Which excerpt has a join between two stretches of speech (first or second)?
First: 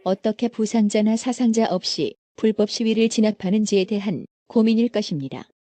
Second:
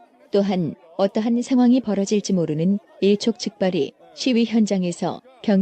first